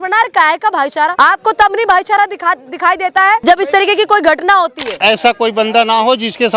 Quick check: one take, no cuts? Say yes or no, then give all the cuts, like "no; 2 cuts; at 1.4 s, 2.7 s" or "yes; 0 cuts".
no; 3 cuts; at 1.1 s, 3.4 s, 4.9 s